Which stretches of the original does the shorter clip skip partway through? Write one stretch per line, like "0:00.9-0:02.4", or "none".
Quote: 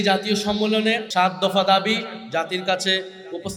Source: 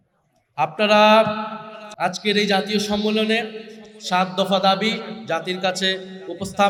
0:03.5-0:04.0